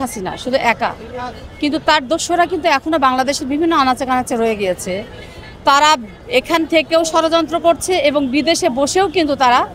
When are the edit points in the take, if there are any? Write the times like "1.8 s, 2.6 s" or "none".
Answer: none

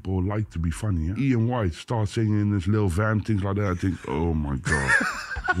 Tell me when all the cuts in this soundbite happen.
1.1 s

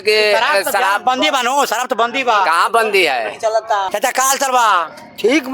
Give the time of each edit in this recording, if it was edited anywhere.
3.9 s

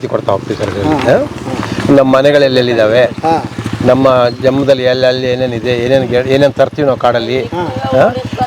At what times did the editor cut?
none

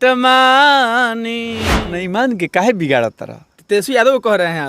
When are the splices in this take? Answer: 1.8 s

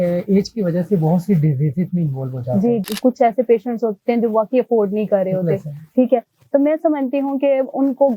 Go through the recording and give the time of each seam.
2.8 s

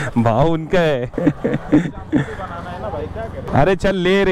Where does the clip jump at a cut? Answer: none

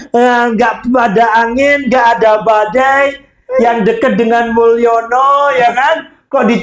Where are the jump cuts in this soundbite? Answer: none

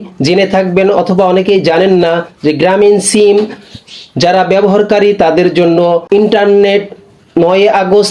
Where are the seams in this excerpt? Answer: 6.0 s

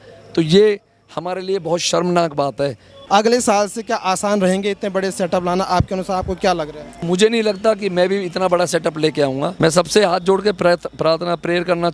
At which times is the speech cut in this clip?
2.9 s, 7.0 s, 9.5 s

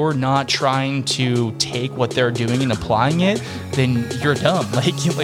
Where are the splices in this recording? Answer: none

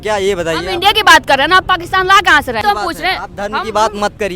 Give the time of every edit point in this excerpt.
2.6 s

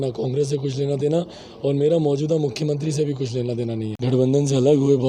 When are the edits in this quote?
3.9 s

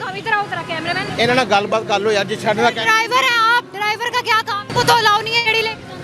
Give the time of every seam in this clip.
1.1 s, 4.7 s

